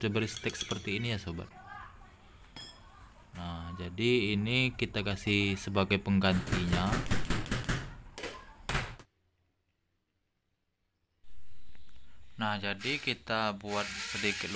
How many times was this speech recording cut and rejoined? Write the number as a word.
one